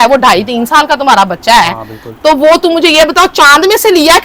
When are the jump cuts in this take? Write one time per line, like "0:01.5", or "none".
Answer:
none